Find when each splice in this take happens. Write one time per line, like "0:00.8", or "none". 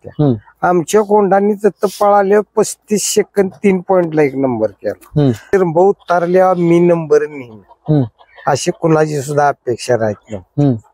0:05.4